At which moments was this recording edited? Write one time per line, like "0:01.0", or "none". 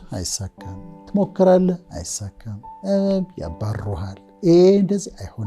none